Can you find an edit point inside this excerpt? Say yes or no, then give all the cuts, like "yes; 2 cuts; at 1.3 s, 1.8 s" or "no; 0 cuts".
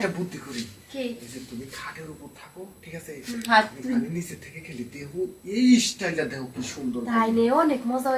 no; 0 cuts